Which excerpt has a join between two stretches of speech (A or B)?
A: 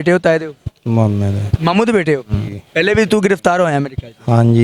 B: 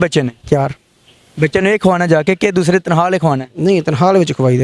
A